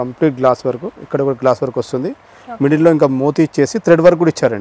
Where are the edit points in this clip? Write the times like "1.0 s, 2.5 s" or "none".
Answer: none

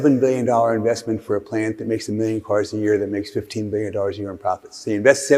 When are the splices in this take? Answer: none

